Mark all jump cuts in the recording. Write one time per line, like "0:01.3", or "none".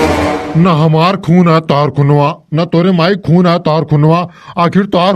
none